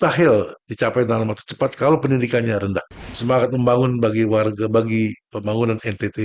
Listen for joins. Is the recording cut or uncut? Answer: cut